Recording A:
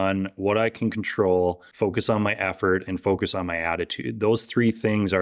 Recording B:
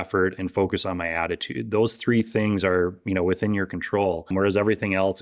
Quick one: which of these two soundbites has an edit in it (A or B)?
B